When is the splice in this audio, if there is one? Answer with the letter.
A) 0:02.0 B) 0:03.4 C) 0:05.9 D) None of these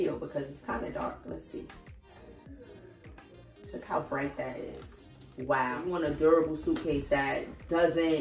C